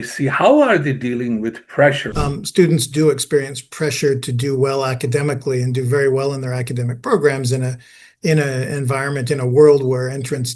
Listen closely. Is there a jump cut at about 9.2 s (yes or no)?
no